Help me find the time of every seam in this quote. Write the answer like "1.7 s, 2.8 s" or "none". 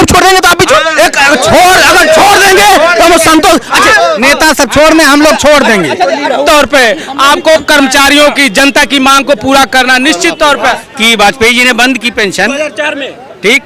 6.4 s, 10.8 s